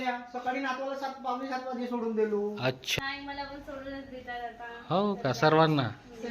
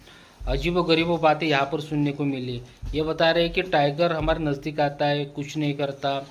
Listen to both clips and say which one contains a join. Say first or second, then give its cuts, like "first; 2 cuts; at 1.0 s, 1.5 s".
first; 1 cut; at 2.8 s